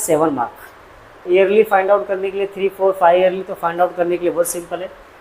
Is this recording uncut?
no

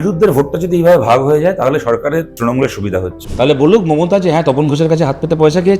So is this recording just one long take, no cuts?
no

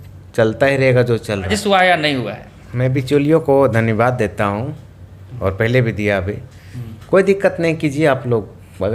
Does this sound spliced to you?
yes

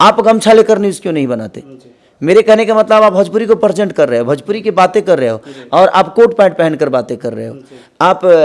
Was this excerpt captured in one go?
yes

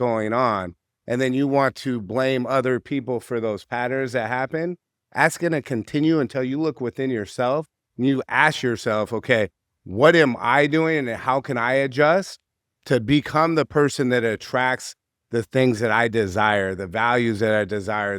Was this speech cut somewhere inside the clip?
no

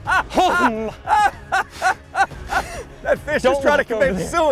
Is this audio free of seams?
no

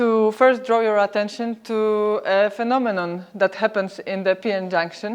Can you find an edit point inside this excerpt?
no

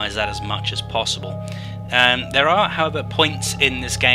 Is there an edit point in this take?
yes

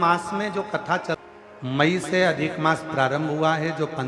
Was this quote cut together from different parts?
yes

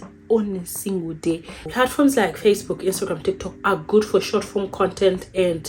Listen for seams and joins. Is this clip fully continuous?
no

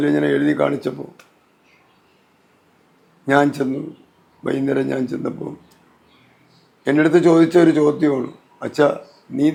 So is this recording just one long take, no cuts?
yes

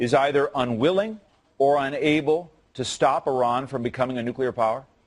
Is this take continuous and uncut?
no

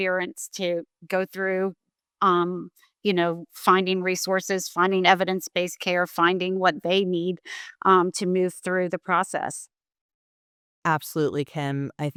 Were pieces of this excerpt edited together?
no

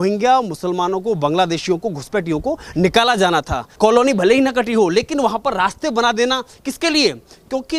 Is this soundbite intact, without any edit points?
no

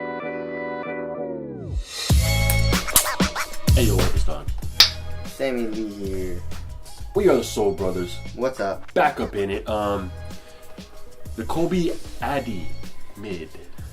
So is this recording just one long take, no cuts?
no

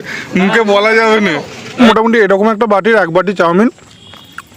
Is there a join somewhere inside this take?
yes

